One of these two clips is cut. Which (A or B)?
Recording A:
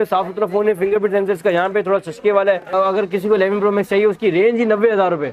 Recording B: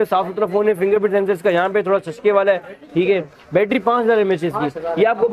A